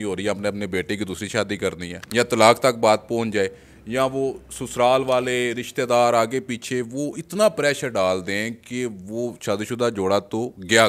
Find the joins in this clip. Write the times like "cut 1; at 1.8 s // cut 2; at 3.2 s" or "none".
none